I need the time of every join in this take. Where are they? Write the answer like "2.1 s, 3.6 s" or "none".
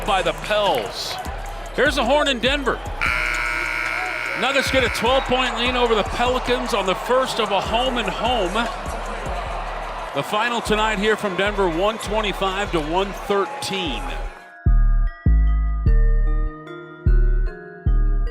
14.4 s